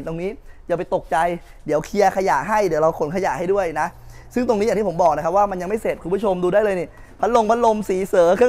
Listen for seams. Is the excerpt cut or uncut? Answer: uncut